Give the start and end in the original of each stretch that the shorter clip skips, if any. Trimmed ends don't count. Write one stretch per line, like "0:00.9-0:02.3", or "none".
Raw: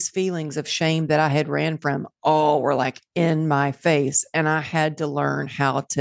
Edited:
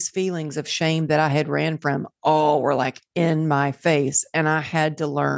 none